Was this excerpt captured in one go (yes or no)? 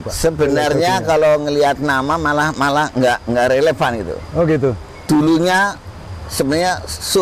yes